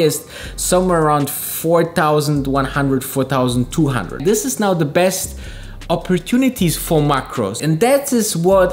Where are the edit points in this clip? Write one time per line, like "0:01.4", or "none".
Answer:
0:04.2
0:07.6